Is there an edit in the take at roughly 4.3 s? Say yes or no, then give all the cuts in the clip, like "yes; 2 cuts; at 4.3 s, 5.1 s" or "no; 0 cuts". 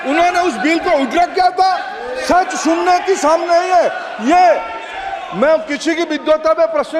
no; 0 cuts